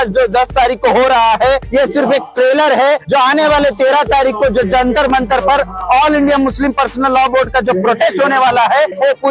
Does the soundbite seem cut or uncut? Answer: uncut